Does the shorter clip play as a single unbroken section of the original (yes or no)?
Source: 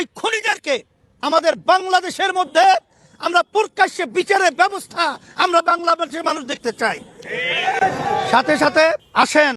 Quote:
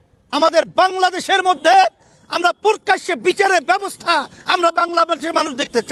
yes